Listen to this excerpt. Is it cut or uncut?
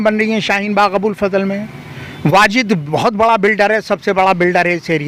uncut